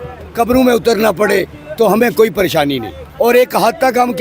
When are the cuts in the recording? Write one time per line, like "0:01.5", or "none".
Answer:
0:03.2